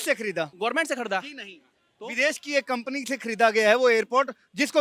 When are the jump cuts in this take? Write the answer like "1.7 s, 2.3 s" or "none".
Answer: none